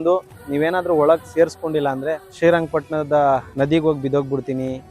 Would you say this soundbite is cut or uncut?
cut